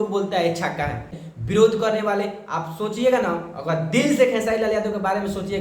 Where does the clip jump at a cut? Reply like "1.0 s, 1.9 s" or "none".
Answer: 1.2 s